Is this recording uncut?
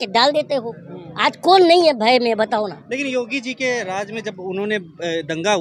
yes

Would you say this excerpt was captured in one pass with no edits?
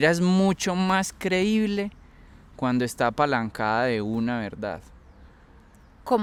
yes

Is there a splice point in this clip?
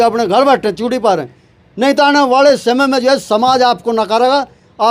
no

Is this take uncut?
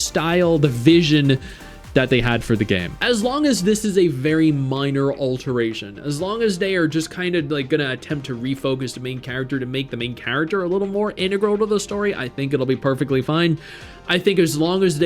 no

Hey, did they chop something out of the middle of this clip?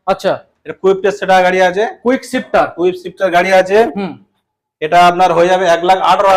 no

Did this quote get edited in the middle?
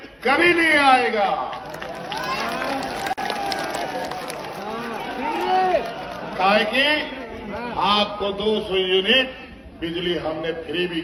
no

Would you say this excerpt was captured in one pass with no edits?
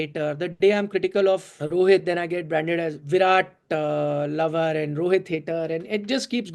no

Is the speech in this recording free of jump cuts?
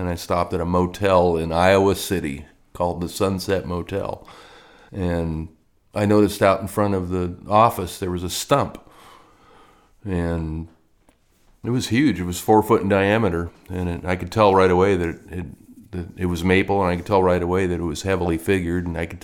yes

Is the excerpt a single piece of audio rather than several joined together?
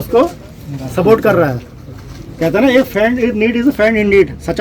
yes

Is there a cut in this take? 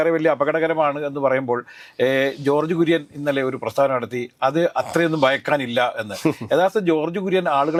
no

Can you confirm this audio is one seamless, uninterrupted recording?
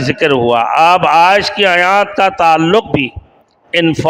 yes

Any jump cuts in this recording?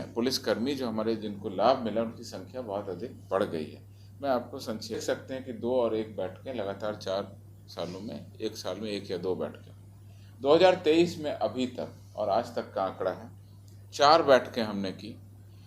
yes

